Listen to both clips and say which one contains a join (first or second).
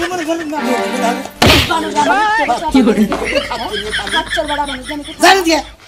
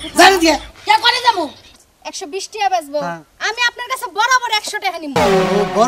second